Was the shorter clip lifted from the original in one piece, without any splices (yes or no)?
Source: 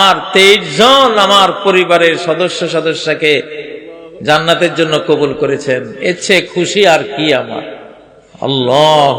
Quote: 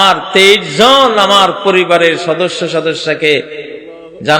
yes